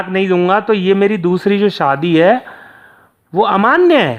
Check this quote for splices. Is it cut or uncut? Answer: uncut